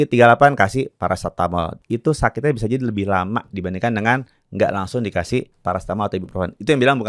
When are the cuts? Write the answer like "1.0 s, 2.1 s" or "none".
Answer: 1.8 s, 5.5 s